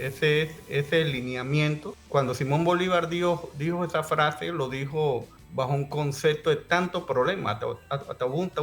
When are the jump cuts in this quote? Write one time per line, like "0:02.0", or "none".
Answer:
0:01.9
0:05.4